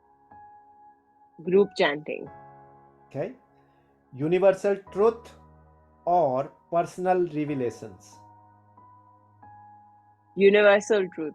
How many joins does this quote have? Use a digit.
2